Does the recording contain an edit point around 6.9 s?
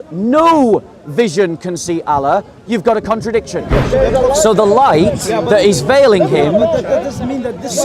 no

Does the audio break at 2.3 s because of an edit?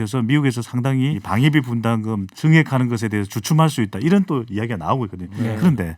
yes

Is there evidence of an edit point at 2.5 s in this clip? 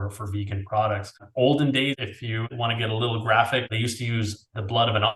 yes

